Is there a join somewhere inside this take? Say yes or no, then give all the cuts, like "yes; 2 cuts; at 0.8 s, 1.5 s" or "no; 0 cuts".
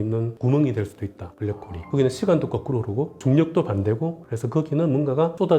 yes; 1 cut; at 1.9 s